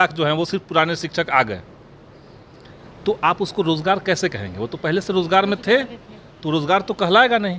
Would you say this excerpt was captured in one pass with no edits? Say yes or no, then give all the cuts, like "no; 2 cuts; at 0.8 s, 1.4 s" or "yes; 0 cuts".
yes; 0 cuts